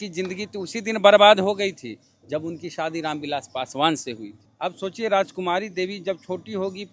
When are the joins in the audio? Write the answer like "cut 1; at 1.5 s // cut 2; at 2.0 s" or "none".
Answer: cut 1; at 4.4 s